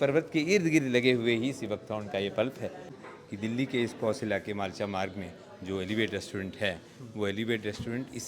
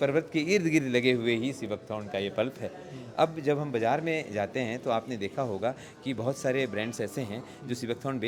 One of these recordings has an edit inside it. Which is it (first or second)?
first